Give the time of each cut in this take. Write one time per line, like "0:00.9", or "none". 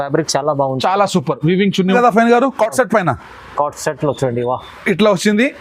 0:01.9